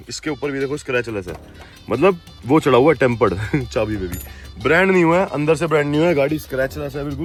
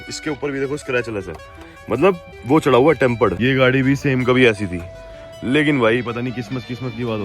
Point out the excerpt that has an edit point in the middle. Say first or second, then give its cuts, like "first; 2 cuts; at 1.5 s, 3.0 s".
second; 1 cut; at 3.4 s